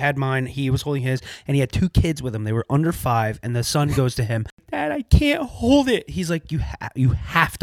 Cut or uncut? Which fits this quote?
cut